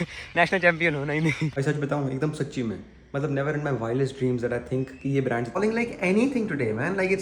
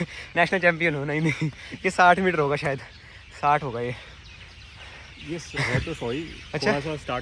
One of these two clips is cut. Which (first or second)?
first